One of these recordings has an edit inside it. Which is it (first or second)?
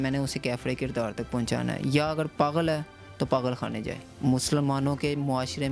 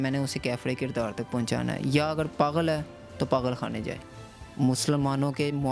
first